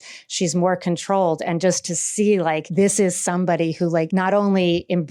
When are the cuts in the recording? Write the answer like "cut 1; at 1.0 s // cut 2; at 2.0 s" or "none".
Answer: cut 1; at 2.7 s // cut 2; at 4.1 s